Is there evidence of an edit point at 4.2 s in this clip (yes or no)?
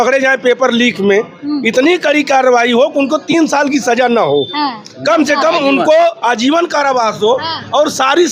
no